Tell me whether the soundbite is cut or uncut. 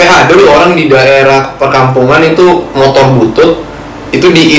uncut